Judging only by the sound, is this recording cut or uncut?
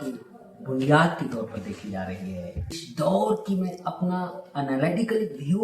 cut